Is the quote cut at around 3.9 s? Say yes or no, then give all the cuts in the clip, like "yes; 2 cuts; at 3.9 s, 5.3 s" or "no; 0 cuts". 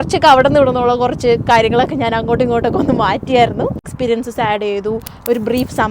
yes; 1 cut; at 3.9 s